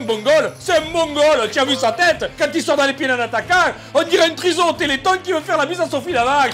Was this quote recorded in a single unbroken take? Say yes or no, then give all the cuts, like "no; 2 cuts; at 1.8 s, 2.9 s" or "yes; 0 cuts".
yes; 0 cuts